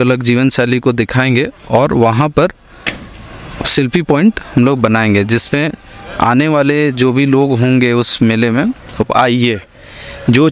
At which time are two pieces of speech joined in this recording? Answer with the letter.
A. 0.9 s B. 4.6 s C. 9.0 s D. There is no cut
C